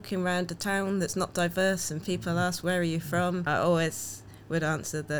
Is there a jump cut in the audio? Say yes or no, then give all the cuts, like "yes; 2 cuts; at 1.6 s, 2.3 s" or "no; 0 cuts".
yes; 1 cut; at 3.5 s